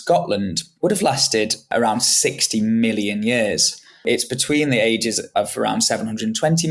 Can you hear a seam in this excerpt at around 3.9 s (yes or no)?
no